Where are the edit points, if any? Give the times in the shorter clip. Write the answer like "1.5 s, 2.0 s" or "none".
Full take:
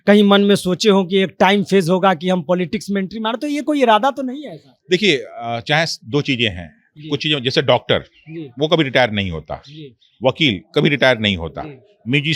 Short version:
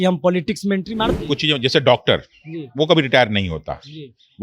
1.1 s